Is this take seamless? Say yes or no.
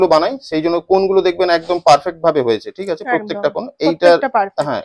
yes